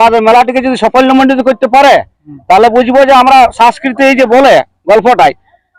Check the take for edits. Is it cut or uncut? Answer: uncut